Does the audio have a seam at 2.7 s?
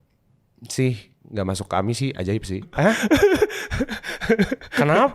yes; 1 cut; at 2.7 s

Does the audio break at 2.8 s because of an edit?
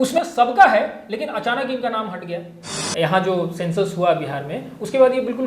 yes; 1 cut; at 2.8 s

